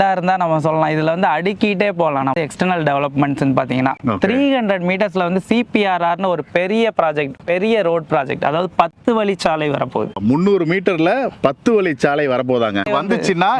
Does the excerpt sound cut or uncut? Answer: uncut